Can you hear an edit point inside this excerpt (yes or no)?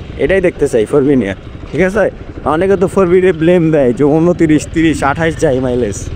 no